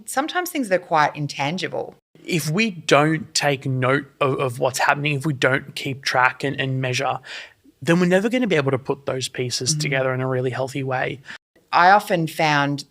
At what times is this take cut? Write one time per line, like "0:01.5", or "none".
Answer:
0:02.1
0:11.5